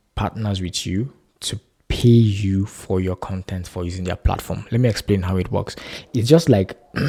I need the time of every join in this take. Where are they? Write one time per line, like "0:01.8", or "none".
none